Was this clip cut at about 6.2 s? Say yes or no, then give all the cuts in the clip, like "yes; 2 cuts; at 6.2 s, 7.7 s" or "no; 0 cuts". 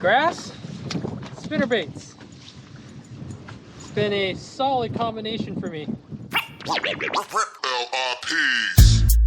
yes; 1 cut; at 6.2 s